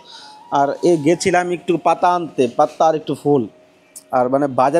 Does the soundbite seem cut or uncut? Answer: uncut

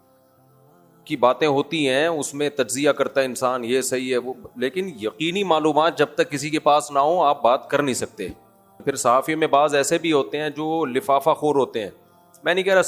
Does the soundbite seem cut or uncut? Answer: cut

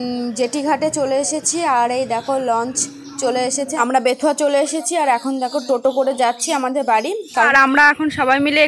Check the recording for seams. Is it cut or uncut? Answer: cut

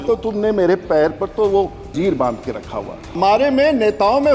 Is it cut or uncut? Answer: cut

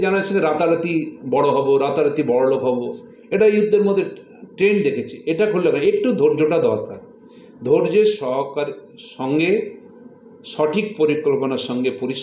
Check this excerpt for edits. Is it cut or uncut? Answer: uncut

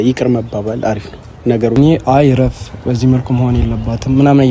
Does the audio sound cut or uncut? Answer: cut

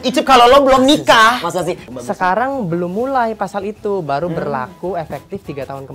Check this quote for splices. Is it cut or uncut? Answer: cut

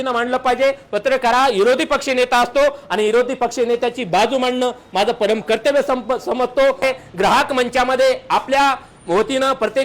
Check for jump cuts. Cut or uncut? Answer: cut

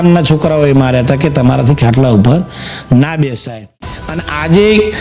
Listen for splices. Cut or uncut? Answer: cut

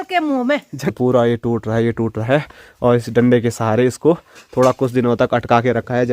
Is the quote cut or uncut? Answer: cut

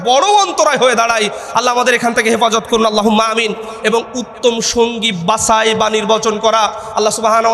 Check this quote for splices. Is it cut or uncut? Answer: uncut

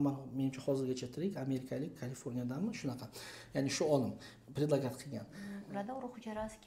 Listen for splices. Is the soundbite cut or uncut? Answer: cut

